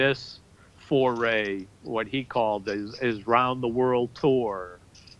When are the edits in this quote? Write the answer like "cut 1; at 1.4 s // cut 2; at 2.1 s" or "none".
none